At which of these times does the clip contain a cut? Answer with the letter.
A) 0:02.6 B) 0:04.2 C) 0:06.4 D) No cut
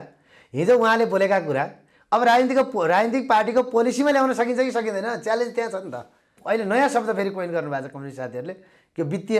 C